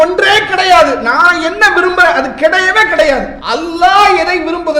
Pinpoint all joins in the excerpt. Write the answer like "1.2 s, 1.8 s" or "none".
3.4 s